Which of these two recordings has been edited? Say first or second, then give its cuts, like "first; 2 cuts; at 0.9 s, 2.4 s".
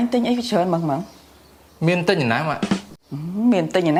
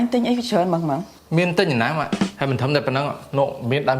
second; 2 cuts; at 1.1 s, 2.4 s